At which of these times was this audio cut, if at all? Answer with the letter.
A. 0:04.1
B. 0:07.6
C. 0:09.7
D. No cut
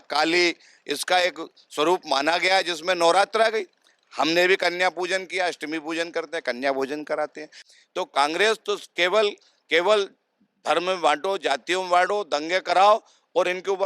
B